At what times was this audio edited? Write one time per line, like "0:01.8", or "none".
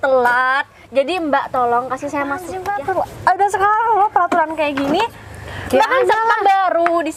0:02.6